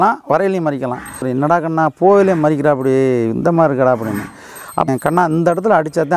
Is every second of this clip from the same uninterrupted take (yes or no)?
no